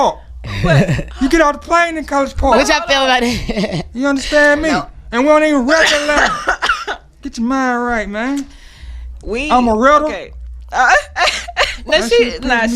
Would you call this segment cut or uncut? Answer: cut